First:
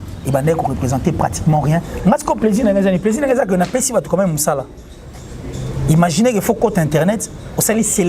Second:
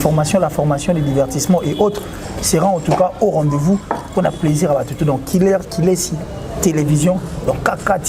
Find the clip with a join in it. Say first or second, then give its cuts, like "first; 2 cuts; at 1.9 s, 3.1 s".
first; 1 cut; at 1.9 s